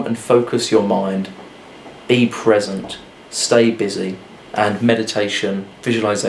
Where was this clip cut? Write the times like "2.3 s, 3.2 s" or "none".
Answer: none

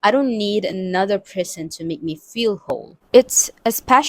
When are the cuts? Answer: 2.9 s

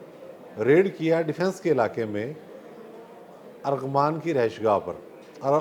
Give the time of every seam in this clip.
none

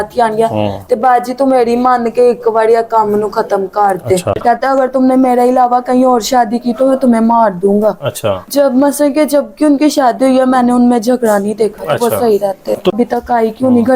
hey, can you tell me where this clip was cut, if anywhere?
4.4 s, 12.9 s

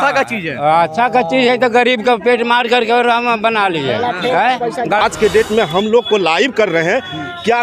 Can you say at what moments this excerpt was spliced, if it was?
5.0 s

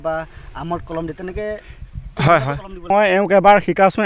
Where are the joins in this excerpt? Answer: 2.9 s

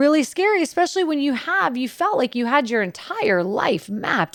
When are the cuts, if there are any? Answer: none

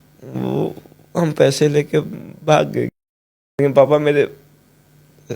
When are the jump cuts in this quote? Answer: 3.5 s

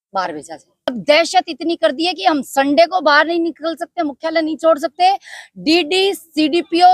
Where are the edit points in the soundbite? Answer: 0.9 s

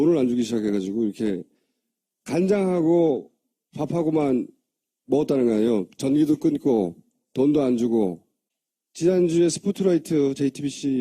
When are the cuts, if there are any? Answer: none

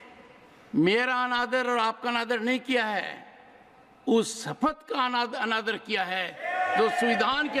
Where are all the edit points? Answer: none

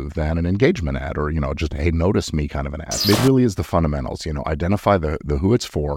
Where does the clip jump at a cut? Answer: 3.0 s

